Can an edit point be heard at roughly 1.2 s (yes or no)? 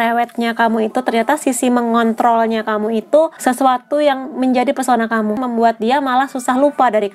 no